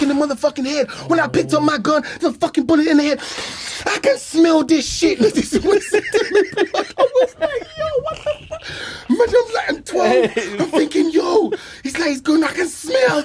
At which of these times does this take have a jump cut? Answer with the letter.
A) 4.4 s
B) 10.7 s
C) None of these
C